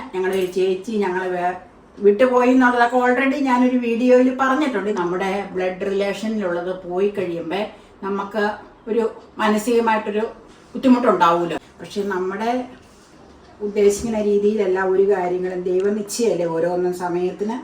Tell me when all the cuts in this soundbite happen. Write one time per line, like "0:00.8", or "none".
0:04.9
0:11.7

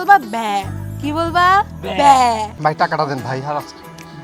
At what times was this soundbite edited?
0:02.5

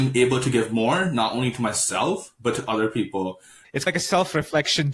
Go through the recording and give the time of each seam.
0:03.6

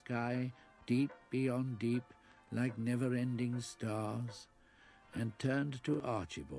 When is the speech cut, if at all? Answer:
0:03.1

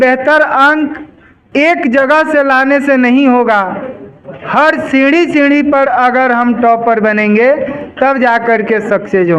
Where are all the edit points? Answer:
none

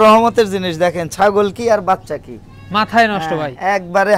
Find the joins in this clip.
none

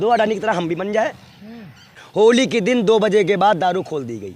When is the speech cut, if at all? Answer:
0:02.0

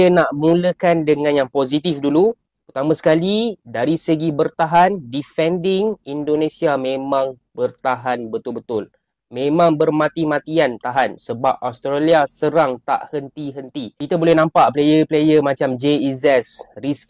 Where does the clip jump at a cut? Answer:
none

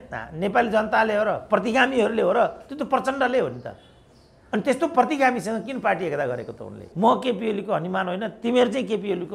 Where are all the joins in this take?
0:06.8

